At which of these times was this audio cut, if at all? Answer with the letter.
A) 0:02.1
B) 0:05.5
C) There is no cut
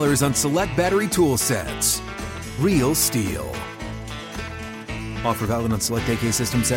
C